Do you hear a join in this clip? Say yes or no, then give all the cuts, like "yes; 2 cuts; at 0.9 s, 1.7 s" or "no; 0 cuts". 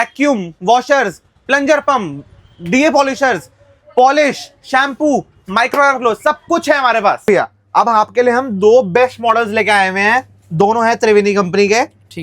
yes; 1 cut; at 7.2 s